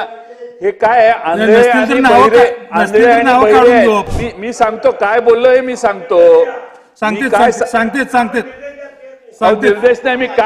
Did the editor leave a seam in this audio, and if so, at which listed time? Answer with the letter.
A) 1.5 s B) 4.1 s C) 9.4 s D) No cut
B